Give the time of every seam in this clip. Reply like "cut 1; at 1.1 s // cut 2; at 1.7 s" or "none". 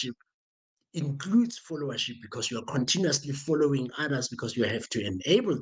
none